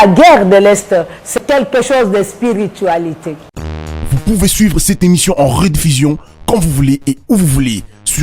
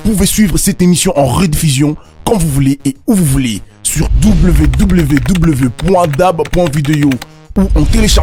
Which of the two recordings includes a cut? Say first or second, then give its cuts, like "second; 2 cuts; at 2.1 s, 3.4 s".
first; 2 cuts; at 1.4 s, 3.3 s